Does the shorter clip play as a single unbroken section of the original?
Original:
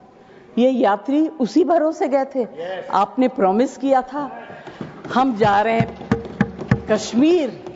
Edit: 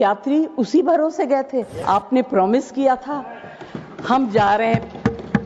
no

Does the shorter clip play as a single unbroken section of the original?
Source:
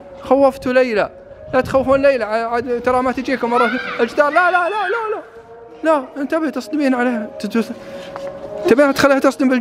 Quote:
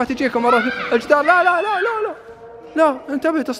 yes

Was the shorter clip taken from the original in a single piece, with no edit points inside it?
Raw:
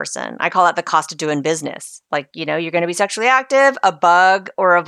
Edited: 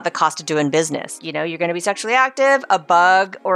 no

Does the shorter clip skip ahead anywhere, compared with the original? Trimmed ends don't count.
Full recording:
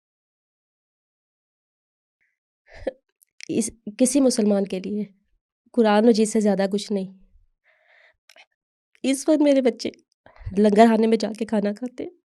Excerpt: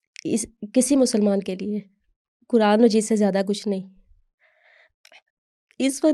no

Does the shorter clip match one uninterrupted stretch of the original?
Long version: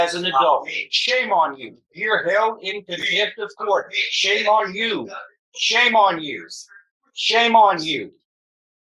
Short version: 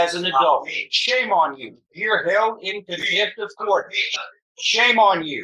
no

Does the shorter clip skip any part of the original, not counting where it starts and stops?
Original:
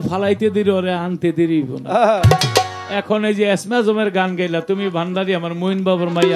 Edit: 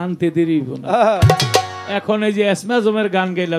no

